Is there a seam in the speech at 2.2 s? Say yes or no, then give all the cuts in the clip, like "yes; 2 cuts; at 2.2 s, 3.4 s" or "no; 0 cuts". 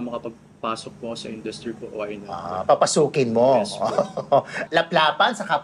no; 1 cut; at 4.6 s